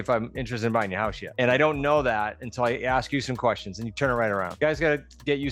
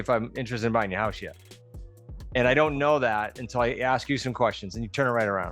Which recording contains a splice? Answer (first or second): first